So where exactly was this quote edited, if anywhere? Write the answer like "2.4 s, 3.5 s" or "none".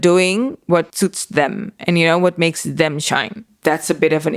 3.4 s